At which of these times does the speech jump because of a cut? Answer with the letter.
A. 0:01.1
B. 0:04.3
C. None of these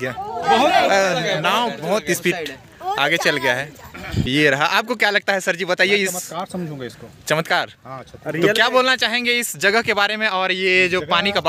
B